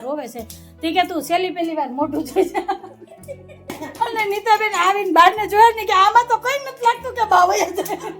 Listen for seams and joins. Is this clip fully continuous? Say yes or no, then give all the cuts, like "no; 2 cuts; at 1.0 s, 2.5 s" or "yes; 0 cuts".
no; 1 cut; at 3.8 s